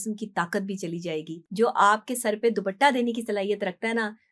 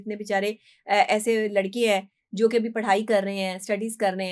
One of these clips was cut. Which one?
first; 1 cut; at 1.4 s

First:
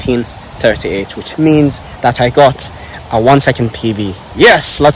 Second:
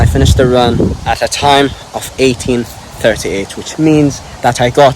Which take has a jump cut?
second; 1 cut; at 1.0 s

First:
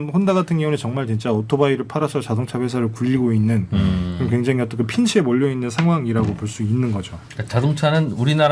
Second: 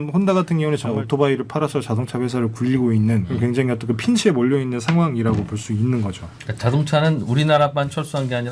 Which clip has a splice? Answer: second; 2 cuts; at 0.9 s, 3.3 s

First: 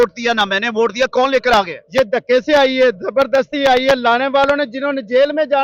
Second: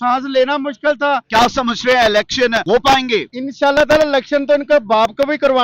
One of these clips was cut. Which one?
second; 3 cuts; at 1.2 s, 2.6 s, 3.4 s

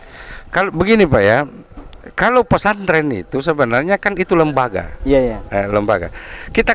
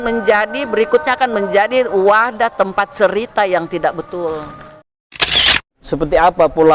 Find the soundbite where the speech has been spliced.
second; 1 cut; at 5.4 s

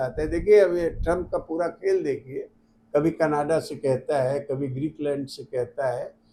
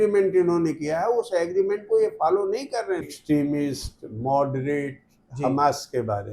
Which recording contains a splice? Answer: second; 1 cut; at 3.1 s

